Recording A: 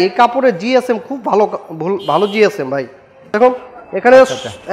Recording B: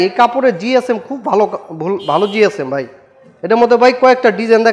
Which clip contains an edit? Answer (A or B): A